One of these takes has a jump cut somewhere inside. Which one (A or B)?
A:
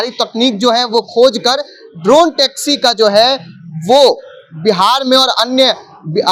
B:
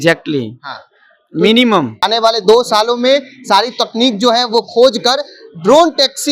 B